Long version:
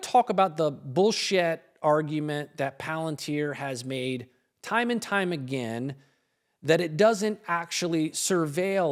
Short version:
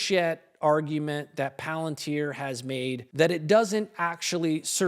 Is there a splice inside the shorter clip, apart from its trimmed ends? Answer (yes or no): yes